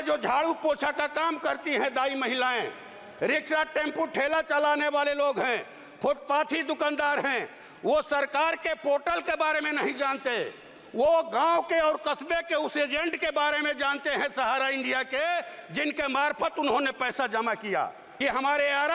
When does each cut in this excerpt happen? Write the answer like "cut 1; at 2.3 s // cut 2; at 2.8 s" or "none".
cut 1; at 18.0 s